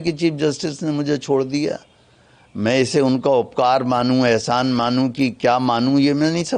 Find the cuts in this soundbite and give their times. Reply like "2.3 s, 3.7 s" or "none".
none